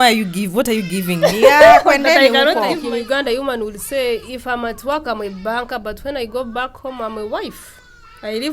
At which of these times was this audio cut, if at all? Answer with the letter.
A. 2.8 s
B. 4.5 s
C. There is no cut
A